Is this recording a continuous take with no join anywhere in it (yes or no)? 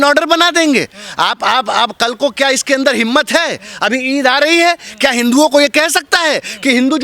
yes